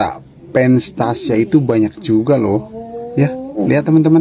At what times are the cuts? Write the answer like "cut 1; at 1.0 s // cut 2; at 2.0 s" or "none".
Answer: none

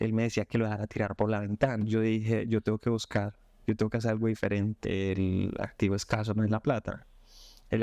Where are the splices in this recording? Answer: cut 1; at 1.8 s // cut 2; at 4.8 s

